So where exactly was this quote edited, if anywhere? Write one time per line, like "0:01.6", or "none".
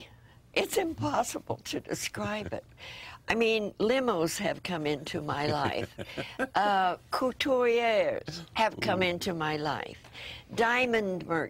none